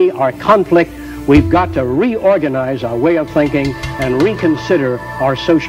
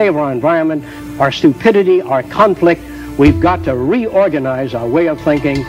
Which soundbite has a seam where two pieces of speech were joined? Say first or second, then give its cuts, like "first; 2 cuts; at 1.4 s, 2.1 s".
second; 1 cut; at 0.9 s